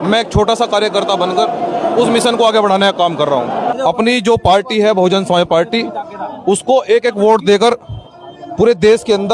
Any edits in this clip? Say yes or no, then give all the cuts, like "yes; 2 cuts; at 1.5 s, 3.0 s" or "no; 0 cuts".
yes; 1 cut; at 3.7 s